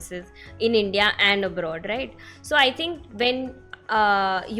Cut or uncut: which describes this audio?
uncut